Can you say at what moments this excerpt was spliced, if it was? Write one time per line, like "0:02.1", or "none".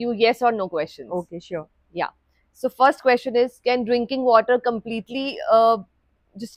none